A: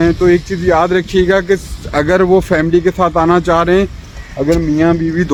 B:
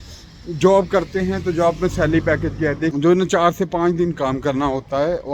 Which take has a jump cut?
B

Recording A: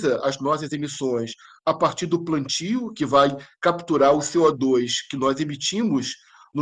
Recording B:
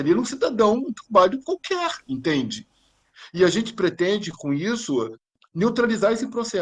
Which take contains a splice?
B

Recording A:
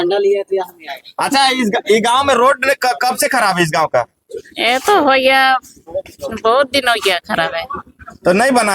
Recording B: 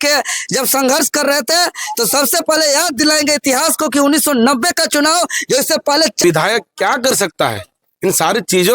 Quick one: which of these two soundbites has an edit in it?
B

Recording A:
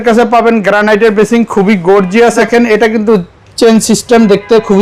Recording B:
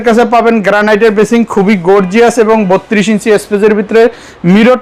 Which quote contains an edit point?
A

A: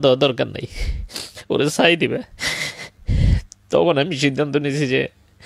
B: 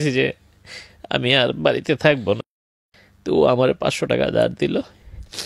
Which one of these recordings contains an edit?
B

